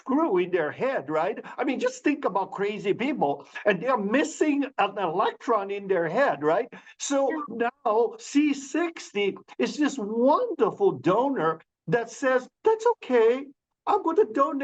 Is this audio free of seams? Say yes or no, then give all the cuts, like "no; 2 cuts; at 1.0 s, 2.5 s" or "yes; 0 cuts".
yes; 0 cuts